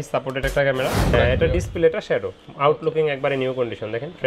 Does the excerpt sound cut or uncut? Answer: cut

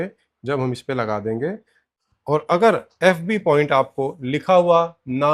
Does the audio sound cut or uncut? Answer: cut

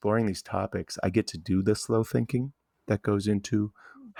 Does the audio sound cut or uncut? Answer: uncut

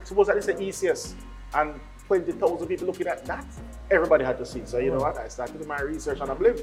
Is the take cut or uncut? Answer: uncut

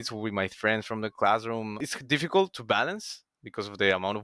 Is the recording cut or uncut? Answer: cut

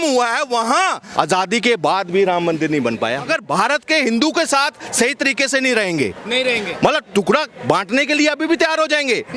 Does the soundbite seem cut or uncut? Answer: cut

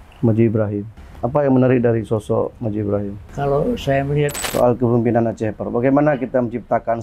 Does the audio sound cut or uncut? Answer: cut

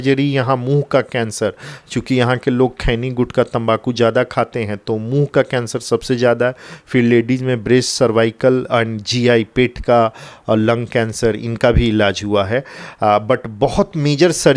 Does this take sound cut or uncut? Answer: uncut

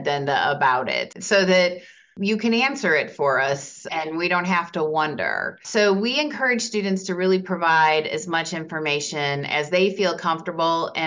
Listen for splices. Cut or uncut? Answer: cut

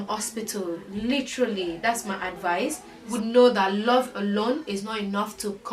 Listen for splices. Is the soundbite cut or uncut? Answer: cut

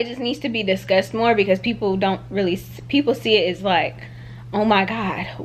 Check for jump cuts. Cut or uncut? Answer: uncut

